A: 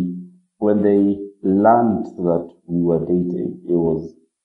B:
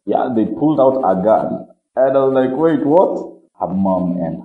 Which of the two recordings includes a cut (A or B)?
B